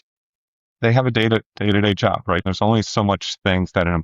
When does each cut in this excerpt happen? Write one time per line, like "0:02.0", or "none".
0:02.4